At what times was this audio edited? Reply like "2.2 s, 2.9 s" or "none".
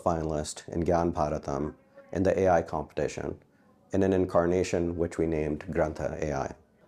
none